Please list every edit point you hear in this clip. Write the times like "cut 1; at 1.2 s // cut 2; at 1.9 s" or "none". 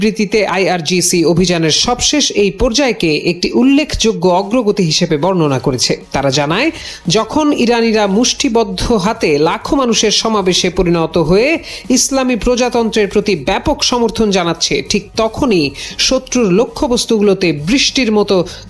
cut 1; at 6.0 s